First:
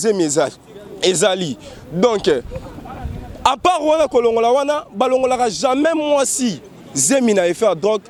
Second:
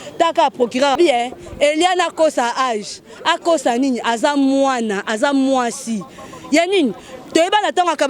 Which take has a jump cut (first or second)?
second